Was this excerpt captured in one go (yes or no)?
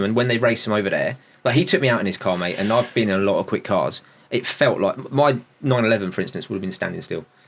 yes